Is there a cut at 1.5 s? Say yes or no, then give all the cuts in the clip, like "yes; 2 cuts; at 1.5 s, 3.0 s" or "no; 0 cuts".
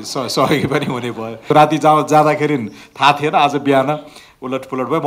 yes; 1 cut; at 1.5 s